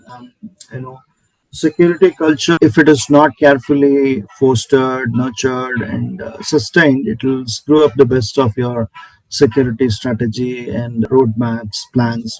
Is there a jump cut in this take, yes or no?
no